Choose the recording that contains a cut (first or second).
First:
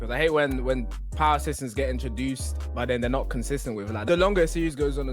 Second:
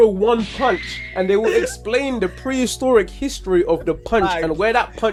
first